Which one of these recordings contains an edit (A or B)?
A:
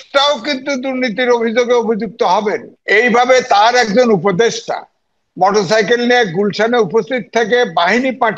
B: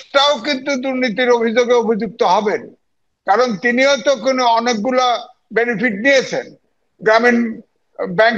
A